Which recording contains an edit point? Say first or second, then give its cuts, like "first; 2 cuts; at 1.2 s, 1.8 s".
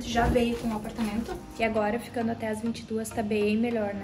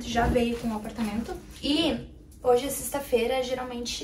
first; 1 cut; at 1.5 s